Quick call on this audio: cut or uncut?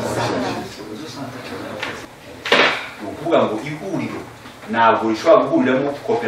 cut